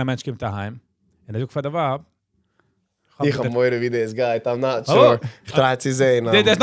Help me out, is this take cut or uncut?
uncut